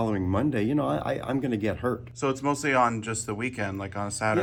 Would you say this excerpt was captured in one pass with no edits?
yes; 0 cuts

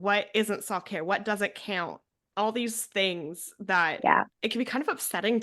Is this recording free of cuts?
no; 1 cut; at 4.3 s

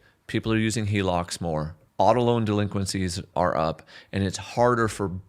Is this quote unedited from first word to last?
no; 2 cuts; at 1.8 s, 3.2 s

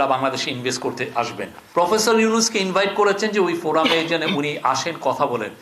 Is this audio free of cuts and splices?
no; 1 cut; at 1.6 s

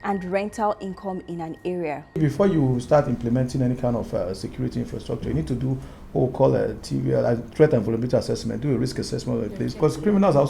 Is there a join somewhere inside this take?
yes; 2 cuts; at 2.2 s, 9.7 s

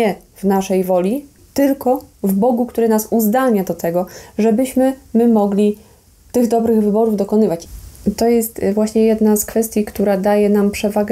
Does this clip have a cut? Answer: yes; 2 cuts; at 1.4 s, 7.6 s

